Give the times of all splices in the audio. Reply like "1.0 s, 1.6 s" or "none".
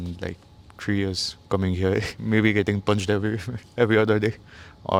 none